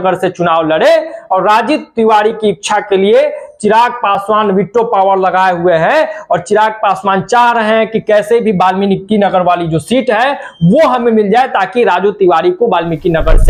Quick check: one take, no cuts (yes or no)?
yes